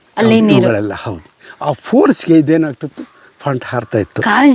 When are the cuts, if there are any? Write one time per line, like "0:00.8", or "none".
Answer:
none